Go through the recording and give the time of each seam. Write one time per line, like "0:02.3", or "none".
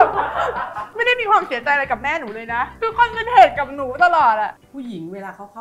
0:02.7
0:04.5